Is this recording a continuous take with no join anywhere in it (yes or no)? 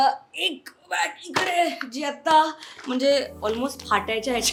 yes